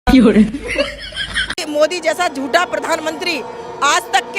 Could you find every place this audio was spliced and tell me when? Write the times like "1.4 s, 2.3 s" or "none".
1.5 s